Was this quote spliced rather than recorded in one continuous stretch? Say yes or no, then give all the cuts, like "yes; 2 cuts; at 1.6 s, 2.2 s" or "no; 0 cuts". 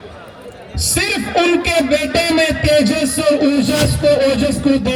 no; 0 cuts